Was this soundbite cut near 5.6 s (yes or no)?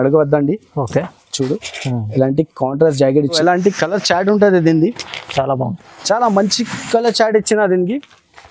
no